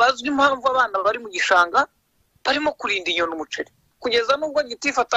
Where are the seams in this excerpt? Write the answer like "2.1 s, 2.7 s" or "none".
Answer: 3.8 s